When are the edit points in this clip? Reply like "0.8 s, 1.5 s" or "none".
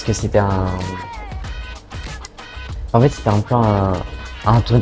none